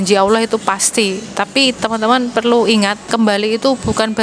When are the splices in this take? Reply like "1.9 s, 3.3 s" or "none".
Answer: 3.0 s